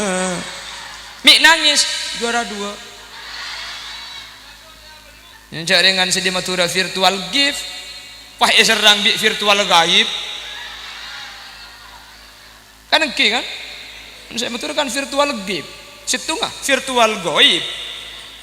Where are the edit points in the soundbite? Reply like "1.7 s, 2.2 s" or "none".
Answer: 5.3 s